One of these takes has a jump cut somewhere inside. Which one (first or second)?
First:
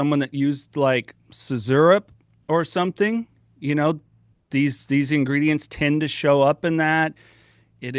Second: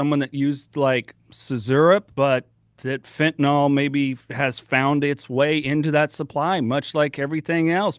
second